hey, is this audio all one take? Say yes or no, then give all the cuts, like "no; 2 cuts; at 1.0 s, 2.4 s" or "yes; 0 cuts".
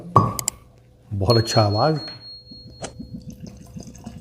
no; 1 cut; at 2.3 s